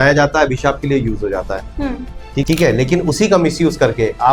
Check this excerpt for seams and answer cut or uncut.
cut